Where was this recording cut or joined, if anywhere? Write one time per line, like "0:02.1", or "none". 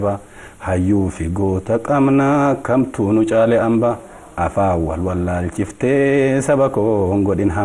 none